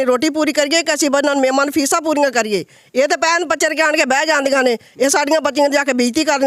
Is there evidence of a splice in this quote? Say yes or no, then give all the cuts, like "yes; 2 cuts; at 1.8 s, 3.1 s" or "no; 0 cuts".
no; 0 cuts